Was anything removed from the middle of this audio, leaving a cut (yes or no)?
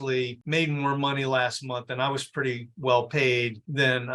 no